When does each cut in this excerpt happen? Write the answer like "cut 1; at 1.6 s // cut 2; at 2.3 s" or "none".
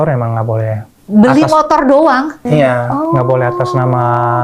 cut 1; at 2.4 s